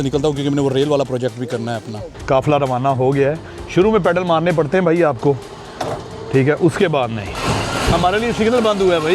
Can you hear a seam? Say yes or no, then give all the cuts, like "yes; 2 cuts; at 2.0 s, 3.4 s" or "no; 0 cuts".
yes; 2 cuts; at 2.1 s, 7.4 s